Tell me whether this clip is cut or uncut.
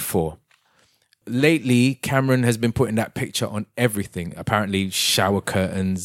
cut